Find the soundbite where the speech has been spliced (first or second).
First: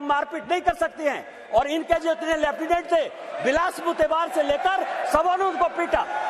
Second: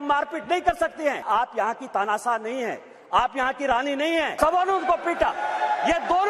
second